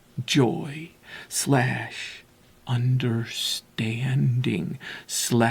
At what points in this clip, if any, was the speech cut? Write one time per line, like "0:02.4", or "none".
none